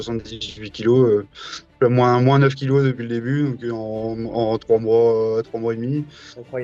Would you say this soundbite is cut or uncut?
uncut